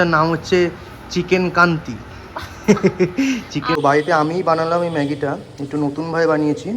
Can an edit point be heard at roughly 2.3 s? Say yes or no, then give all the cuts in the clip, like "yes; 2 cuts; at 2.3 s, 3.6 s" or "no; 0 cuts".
no; 1 cut; at 3.8 s